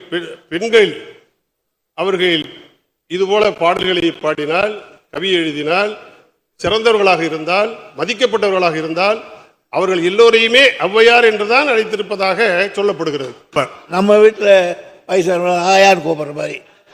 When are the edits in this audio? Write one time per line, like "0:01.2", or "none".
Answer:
0:13.6